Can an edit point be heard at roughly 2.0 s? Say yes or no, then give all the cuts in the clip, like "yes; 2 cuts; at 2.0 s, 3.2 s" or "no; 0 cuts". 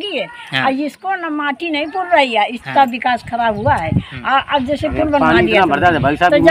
no; 0 cuts